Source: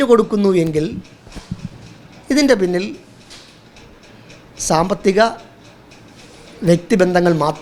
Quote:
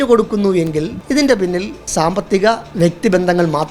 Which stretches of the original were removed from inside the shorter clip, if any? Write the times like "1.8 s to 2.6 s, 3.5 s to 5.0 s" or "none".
1.0 s to 2.2 s, 3.0 s to 4.5 s, 5.4 s to 6.5 s